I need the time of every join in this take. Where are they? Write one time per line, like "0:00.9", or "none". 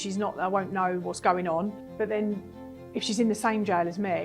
0:01.8